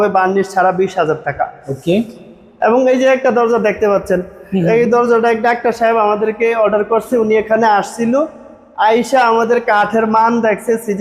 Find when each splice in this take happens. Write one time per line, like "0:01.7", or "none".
none